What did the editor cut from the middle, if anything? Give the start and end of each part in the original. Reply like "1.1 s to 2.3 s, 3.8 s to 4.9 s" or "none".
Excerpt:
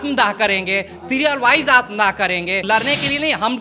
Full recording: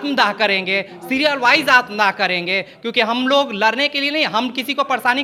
2.6 s to 3.5 s